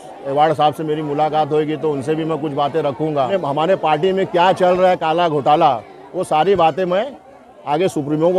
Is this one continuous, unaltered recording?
no; 1 cut; at 3.3 s

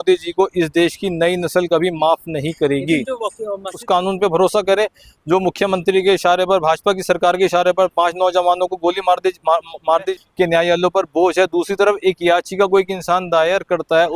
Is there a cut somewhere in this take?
yes; 2 cuts; at 3.8 s, 10.1 s

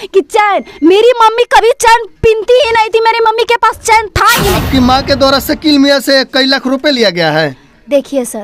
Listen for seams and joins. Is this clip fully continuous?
no; 1 cut; at 4.6 s

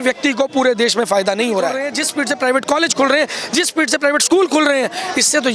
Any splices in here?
yes; 1 cut; at 2.0 s

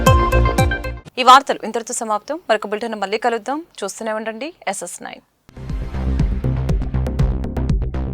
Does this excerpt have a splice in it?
no; 0 cuts

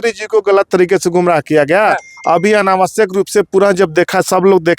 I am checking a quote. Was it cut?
no; 0 cuts

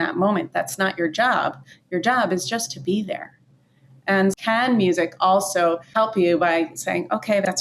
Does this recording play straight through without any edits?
no; 2 cuts; at 4.4 s, 5.9 s

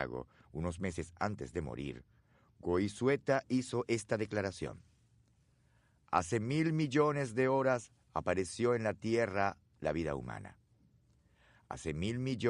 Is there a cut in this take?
no; 0 cuts

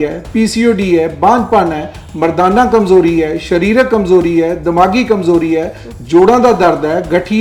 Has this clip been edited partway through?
no; 0 cuts

